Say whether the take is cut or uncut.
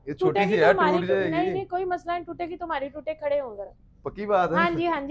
uncut